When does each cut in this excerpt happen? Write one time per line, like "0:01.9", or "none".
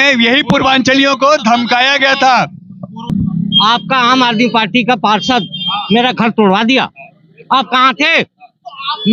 0:03.1